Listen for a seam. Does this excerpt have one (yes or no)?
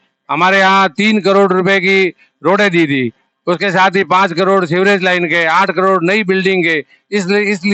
no